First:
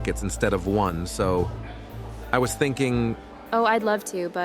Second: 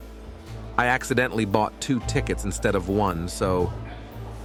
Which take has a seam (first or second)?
first